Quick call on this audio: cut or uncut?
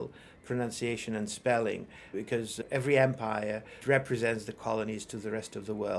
uncut